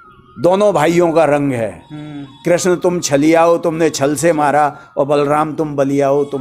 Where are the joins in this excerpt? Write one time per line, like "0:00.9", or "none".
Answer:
none

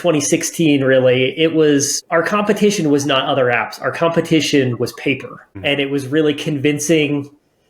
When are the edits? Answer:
0:02.0
0:05.5

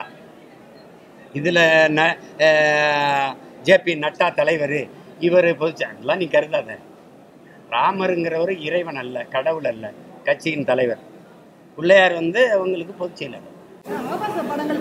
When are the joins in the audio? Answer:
0:13.7

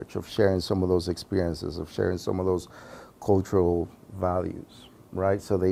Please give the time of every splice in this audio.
none

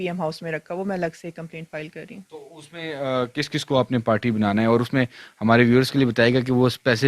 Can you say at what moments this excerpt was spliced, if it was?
none

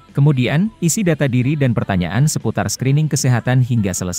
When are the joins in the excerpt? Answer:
none

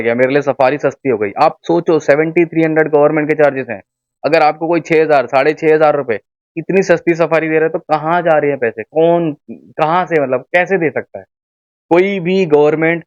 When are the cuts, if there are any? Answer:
none

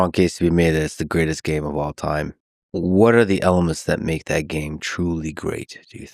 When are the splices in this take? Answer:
none

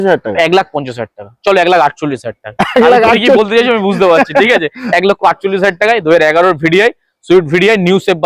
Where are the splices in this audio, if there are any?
none

